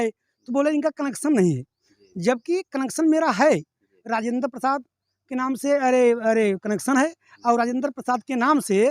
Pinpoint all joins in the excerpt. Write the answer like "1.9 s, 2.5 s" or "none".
none